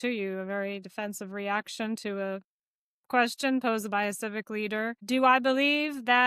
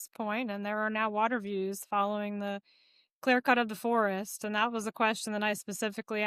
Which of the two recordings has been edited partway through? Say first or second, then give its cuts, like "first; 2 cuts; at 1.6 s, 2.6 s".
first; 1 cut; at 5.0 s